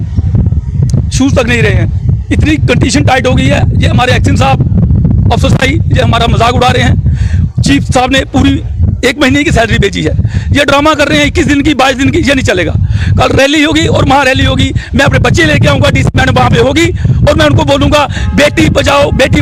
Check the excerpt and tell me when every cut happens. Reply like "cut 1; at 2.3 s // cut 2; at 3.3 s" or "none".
none